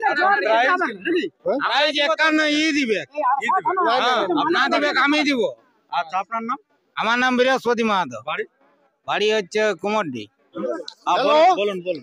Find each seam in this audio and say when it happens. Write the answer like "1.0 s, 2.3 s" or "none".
10.5 s

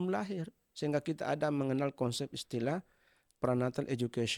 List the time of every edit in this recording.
none

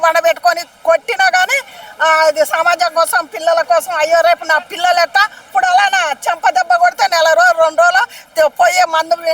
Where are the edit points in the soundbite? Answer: 5.4 s

